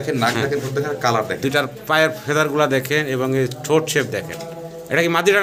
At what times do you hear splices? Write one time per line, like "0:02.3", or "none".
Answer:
none